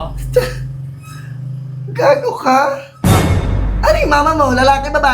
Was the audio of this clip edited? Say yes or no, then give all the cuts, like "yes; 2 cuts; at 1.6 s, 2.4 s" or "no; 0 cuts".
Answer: no; 0 cuts